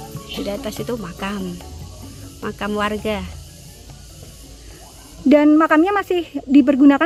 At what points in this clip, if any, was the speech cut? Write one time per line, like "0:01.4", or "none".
none